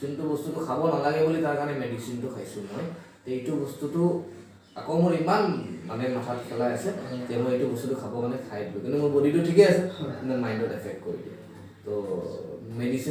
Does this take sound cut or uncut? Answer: uncut